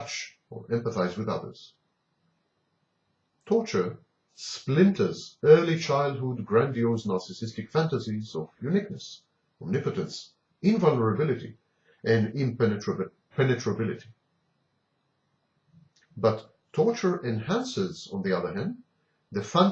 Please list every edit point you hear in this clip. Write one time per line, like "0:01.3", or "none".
none